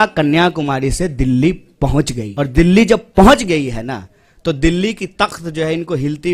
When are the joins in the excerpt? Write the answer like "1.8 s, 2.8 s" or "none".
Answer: 2.2 s